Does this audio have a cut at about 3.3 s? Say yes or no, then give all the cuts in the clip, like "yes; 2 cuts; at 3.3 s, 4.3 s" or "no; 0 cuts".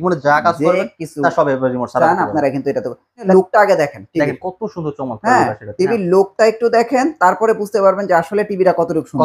yes; 1 cut; at 3.3 s